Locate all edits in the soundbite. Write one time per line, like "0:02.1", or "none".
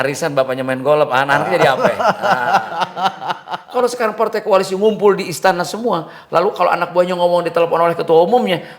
0:03.5